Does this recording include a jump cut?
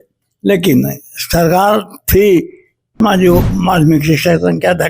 yes; 1 cut; at 3.0 s

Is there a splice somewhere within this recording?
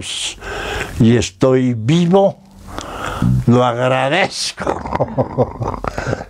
no; 0 cuts

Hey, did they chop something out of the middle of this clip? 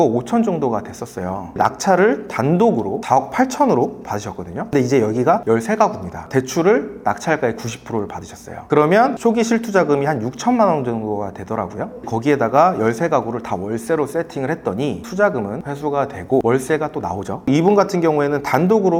no; 0 cuts

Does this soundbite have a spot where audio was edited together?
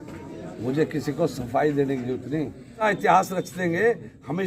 yes; 1 cut; at 2.8 s

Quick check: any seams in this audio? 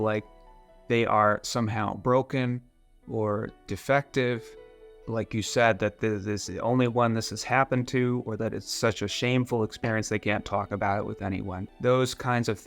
yes; 1 cut; at 11.6 s

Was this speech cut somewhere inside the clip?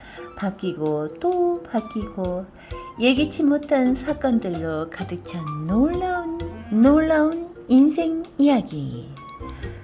yes; 1 cut; at 6.5 s

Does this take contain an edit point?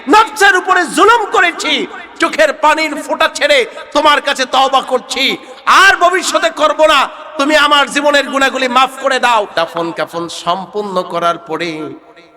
yes; 1 cut; at 9.5 s

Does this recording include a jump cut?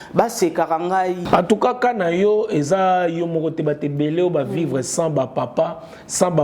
yes; 1 cut; at 1.2 s

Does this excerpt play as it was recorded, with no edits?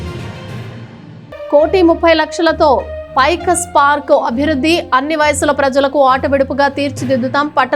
yes; 0 cuts

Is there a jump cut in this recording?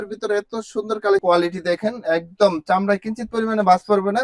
yes; 1 cut; at 1.2 s

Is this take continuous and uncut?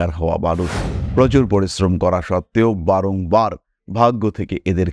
yes; 0 cuts

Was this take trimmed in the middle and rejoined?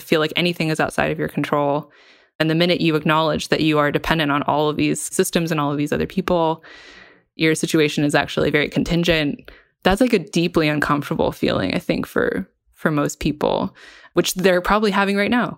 yes; 1 cut; at 14.1 s

